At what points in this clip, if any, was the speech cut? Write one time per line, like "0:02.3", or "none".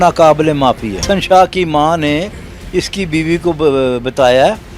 0:01.0